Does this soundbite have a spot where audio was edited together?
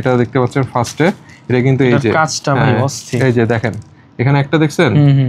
no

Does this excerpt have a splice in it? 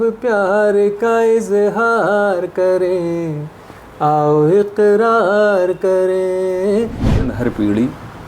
yes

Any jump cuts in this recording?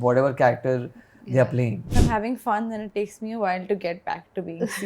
yes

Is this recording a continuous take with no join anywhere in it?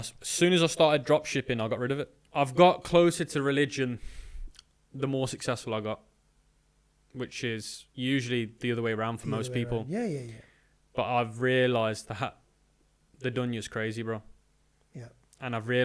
no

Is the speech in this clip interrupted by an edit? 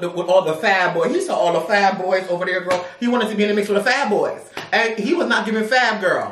no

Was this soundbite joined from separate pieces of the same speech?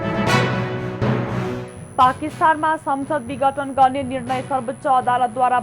yes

